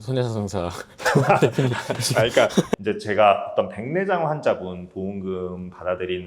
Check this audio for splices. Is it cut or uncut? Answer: cut